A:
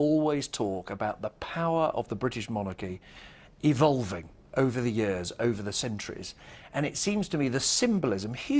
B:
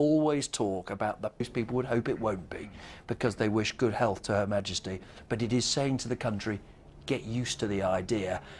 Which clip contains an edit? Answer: A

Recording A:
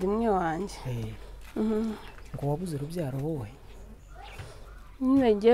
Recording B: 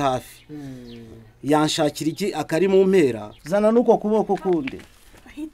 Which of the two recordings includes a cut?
B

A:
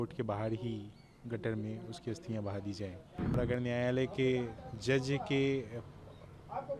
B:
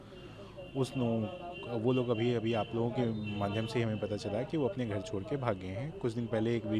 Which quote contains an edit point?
A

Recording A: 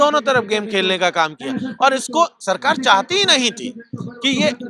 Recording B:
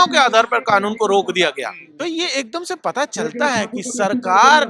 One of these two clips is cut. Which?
B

